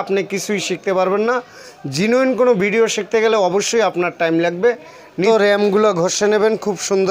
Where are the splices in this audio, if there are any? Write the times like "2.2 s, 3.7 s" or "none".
5.3 s